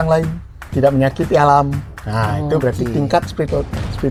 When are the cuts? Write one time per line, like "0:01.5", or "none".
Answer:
none

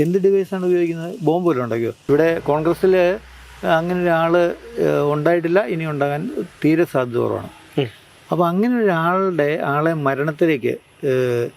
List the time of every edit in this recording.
0:01.9

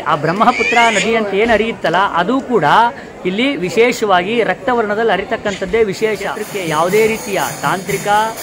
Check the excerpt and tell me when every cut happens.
0:06.7

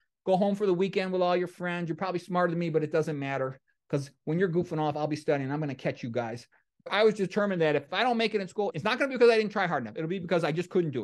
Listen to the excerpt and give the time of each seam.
0:06.9
0:07.8
0:08.7

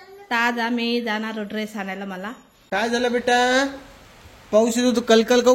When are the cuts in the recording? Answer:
0:02.5

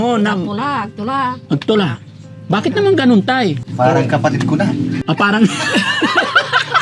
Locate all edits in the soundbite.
0:03.6

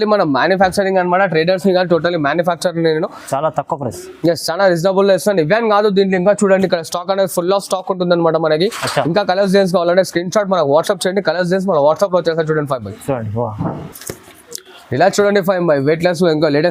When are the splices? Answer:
none

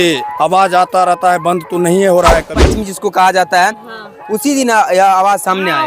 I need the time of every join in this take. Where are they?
0:02.6

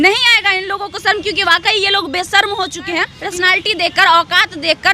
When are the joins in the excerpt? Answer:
0:03.1

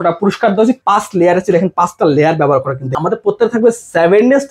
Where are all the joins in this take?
0:00.8
0:02.8

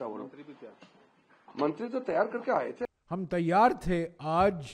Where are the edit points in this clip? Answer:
0:02.9

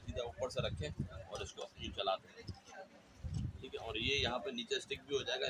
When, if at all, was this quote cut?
none

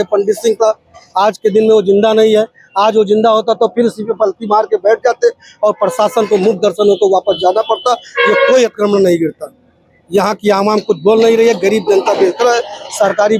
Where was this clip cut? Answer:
none

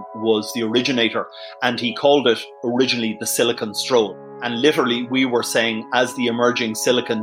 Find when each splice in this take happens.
none

